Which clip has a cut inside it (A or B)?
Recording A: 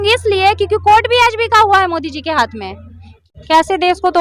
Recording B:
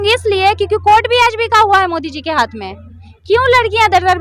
A